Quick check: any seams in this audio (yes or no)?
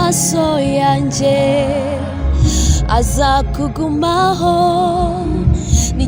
no